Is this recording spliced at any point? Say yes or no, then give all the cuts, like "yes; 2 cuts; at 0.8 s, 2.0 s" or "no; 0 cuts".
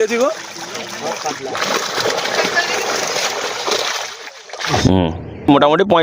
yes; 1 cut; at 4.8 s